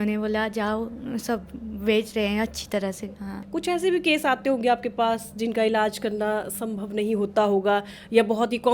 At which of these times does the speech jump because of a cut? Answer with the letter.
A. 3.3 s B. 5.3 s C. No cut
A